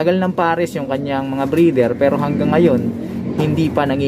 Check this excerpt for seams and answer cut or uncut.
uncut